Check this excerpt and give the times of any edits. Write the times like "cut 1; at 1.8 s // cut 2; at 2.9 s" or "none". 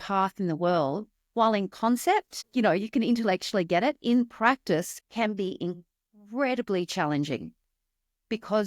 cut 1; at 2.4 s // cut 2; at 5.0 s